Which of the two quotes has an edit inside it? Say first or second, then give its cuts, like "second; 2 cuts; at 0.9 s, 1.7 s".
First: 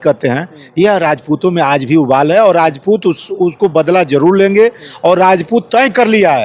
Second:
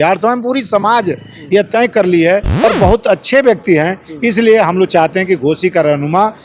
second; 1 cut; at 2.6 s